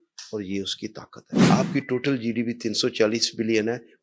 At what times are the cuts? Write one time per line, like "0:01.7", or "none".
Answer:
none